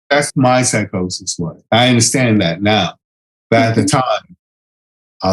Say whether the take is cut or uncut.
uncut